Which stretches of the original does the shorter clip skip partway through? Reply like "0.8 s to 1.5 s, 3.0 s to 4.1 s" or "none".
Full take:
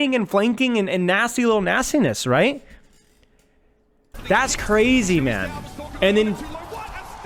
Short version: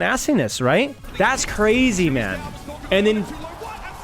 2.7 s to 4.1 s